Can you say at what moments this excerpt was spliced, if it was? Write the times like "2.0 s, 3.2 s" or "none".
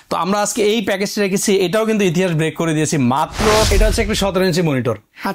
3.7 s